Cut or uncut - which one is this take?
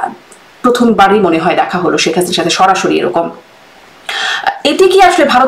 uncut